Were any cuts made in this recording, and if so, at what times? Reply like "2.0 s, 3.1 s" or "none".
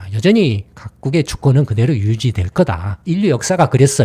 2.9 s